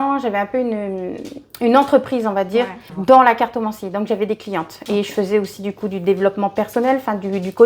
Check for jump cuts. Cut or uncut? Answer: uncut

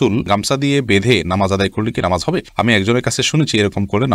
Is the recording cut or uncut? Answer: uncut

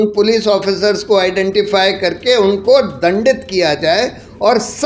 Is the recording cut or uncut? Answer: uncut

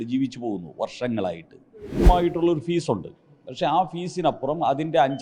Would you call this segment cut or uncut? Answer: cut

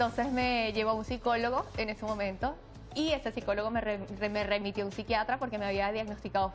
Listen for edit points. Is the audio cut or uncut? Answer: uncut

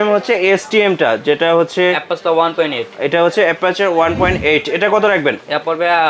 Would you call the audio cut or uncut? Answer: uncut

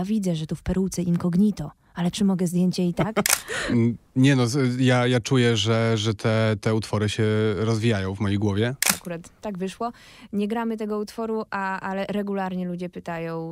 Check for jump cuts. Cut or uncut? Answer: cut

